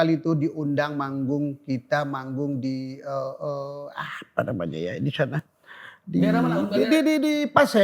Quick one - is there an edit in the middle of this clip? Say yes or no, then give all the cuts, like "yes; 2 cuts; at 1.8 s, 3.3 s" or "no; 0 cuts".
no; 0 cuts